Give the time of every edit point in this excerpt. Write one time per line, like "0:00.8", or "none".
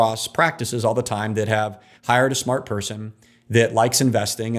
none

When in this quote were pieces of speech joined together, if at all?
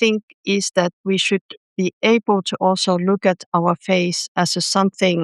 none

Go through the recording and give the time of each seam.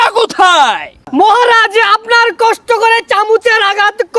0:01.0

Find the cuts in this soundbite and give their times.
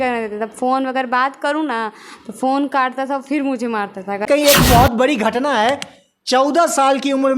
0:04.3

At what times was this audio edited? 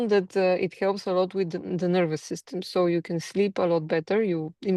none

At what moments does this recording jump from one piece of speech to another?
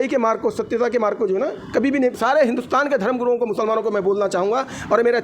0:02.1

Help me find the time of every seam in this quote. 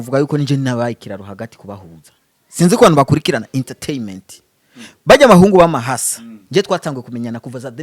none

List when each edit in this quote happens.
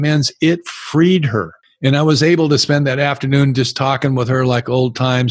0:01.6

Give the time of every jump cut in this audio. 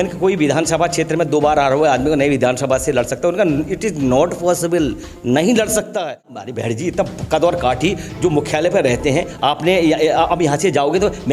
0:06.4

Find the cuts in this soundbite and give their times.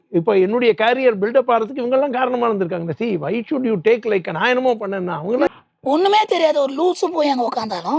0:05.5

